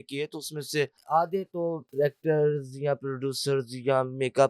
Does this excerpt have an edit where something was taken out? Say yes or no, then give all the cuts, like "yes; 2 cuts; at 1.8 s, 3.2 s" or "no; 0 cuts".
yes; 2 cuts; at 1.0 s, 1.8 s